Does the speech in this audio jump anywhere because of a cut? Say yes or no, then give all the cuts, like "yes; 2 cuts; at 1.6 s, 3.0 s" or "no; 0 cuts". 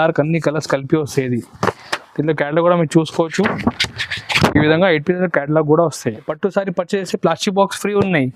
yes; 2 cuts; at 1.9 s, 6.3 s